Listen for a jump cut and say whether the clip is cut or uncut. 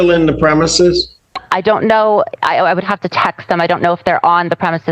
uncut